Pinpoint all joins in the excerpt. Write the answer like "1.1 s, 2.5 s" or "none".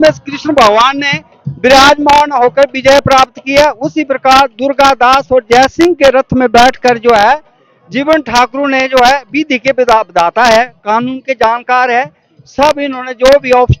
none